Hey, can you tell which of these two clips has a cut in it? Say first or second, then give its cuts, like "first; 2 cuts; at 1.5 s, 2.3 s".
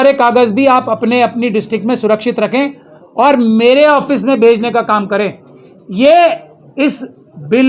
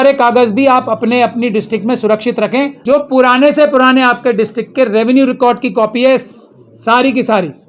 second; 1 cut; at 2.8 s